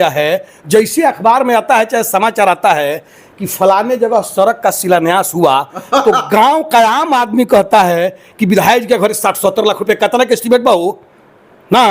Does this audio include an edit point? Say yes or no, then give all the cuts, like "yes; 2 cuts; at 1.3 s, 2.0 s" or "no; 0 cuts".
no; 0 cuts